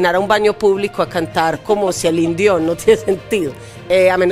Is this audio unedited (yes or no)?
yes